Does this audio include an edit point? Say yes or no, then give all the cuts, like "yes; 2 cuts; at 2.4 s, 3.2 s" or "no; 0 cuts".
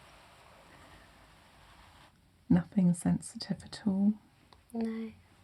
yes; 1 cut; at 2.1 s